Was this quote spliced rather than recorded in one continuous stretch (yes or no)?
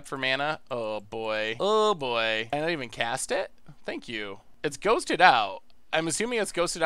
yes